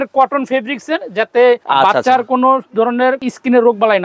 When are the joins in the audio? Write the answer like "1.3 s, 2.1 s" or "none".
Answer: 1.6 s, 3.2 s

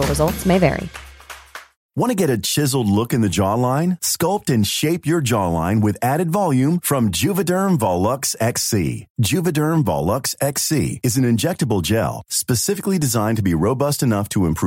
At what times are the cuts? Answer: 1.6 s

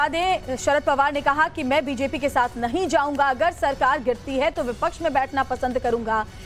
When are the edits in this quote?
1.2 s

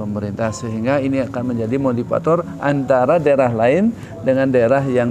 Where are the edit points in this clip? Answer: none

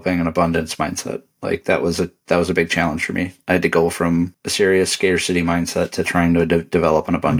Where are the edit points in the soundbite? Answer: none

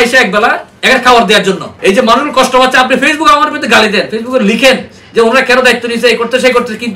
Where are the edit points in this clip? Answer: 1.7 s

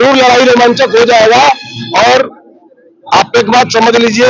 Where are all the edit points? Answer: none

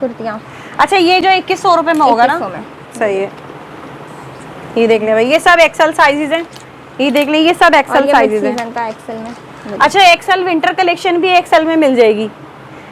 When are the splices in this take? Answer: none

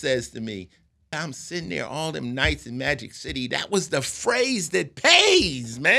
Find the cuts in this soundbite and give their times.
1.1 s

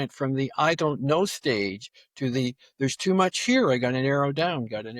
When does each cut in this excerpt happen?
none

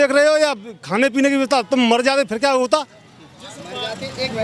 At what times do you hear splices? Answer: none

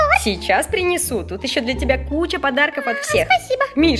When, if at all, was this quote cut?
none

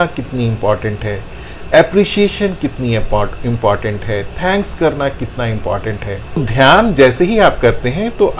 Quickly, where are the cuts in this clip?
6.4 s

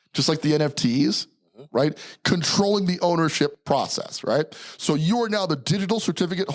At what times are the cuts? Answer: 3.6 s

